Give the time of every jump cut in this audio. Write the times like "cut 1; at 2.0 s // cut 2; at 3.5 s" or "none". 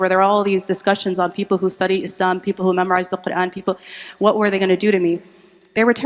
none